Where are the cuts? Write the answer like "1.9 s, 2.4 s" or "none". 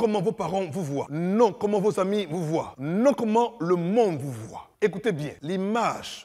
1.1 s, 2.8 s, 5.3 s